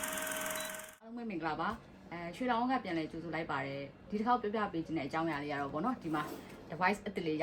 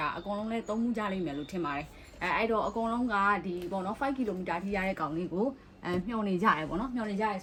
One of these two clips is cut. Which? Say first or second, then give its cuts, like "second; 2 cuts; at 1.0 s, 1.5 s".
first; 1 cut; at 0.9 s